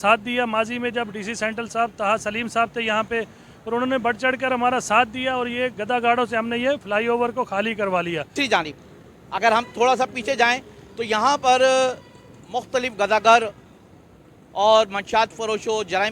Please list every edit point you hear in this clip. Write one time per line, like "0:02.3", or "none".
0:08.3